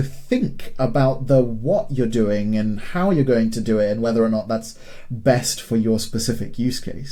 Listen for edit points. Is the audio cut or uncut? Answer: uncut